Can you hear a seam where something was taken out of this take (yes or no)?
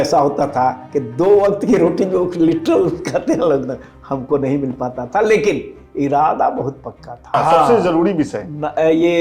yes